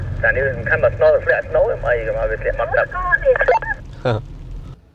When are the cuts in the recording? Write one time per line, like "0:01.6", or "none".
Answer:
none